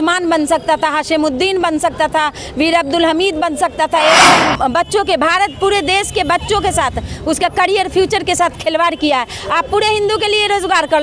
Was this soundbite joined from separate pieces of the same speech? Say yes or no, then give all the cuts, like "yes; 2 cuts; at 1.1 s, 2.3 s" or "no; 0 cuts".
yes; 1 cut; at 4.3 s